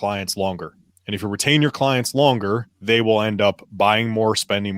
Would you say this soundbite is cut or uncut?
cut